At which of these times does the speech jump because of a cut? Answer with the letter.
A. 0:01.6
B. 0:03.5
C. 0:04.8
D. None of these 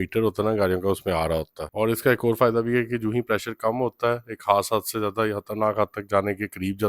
A